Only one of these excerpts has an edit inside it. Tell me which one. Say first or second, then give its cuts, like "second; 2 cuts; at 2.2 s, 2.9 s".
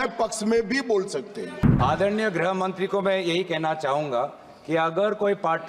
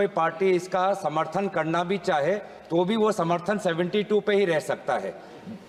first; 1 cut; at 1.7 s